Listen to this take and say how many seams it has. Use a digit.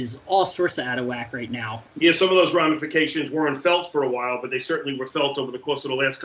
1